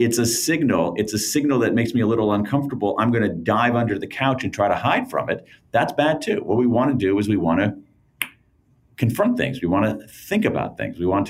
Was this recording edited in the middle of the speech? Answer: no; 0 cuts

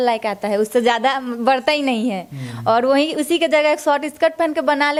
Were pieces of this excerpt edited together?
no; 0 cuts

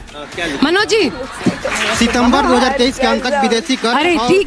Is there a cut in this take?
yes; 1 cut; at 1.8 s

